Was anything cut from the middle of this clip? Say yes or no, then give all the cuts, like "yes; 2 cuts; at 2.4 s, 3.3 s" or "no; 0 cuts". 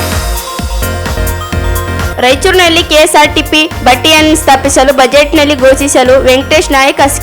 yes; 1 cut; at 1.8 s